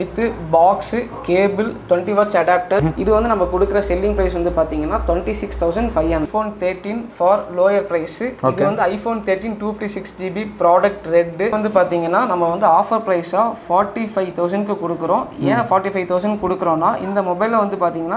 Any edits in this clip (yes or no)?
yes